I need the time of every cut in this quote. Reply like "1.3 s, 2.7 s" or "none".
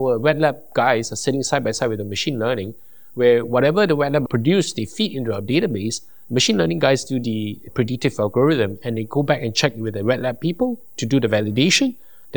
none